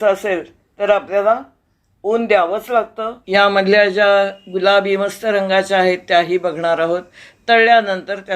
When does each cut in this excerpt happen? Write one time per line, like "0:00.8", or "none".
0:03.2